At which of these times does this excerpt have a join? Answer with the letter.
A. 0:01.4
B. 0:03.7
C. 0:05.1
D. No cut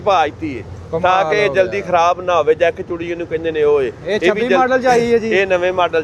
D